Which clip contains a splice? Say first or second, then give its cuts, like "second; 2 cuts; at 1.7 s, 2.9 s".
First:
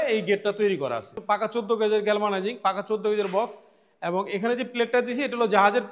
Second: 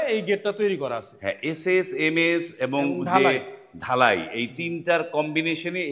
first; 1 cut; at 1.1 s